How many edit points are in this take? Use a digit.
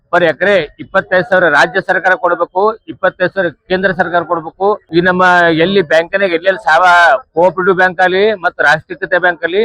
1